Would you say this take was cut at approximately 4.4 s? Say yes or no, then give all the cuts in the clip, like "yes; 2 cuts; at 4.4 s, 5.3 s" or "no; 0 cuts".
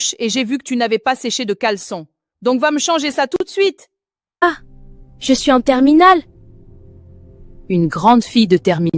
yes; 1 cut; at 4.4 s